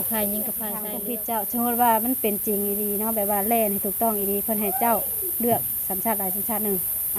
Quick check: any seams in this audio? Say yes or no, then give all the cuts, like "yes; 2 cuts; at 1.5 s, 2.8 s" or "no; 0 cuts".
yes; 1 cut; at 0.9 s